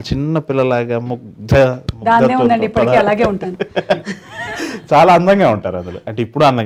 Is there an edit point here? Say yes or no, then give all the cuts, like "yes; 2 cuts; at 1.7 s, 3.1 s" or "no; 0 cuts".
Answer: no; 0 cuts